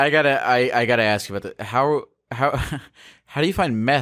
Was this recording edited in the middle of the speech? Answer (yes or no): no